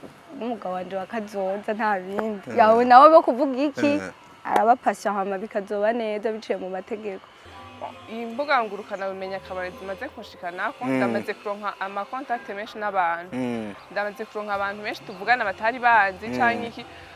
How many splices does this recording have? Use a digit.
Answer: 1